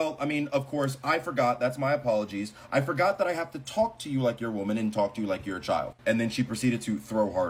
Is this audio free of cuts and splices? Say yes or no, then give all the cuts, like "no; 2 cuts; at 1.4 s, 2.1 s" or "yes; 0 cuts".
yes; 0 cuts